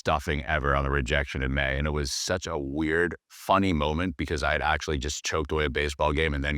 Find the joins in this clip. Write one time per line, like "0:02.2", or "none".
0:03.3